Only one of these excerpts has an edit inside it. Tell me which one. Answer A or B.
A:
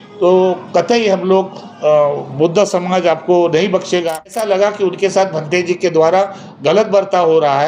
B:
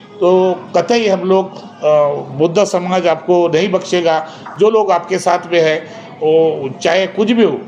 A